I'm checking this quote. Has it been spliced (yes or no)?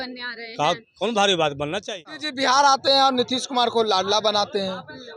yes